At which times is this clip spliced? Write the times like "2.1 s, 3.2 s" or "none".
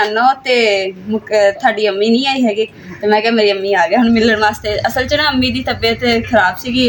none